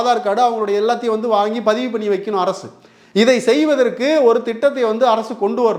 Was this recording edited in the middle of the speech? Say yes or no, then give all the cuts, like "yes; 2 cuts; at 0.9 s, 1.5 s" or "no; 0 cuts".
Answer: no; 0 cuts